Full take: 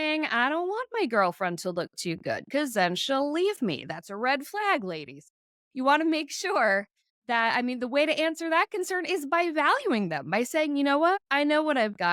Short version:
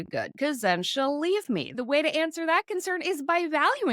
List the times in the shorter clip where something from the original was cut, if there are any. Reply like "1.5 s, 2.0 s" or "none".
1.8 s